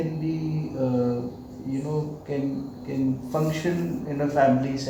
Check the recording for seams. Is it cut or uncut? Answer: uncut